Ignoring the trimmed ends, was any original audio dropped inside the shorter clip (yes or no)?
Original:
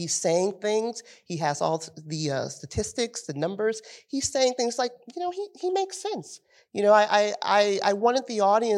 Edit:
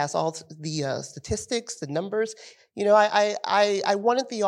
yes